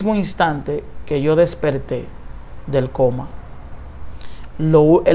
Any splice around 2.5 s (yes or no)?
no